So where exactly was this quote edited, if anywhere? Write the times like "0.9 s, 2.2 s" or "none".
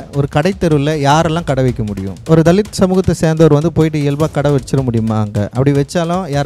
none

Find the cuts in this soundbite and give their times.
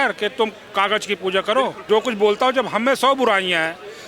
1.8 s

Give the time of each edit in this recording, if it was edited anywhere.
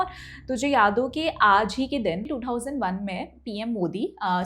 2.2 s

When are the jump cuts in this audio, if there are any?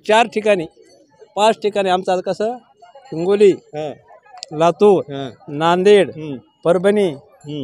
none

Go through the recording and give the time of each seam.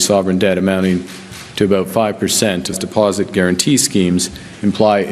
none

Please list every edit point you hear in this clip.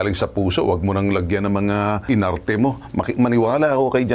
2.0 s

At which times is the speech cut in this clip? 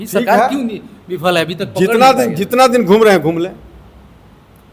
none

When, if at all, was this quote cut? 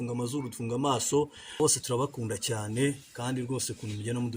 1.6 s

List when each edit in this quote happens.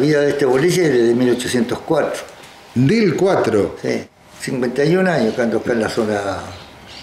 4.0 s

